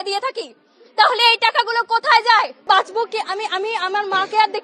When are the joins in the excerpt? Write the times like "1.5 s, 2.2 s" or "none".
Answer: 2.6 s